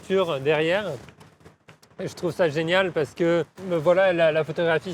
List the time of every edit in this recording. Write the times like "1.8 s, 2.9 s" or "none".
3.6 s